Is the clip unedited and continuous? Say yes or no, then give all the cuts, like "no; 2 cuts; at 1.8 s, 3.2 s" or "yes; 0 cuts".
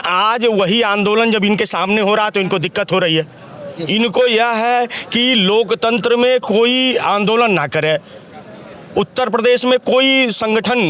yes; 0 cuts